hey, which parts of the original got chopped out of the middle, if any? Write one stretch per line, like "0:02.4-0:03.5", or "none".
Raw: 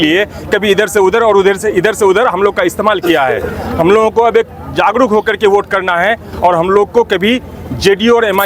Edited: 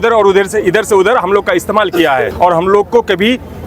0:03.4-0:06.3